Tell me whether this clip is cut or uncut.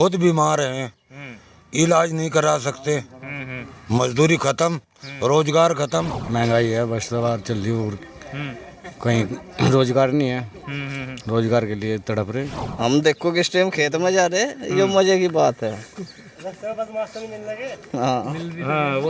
cut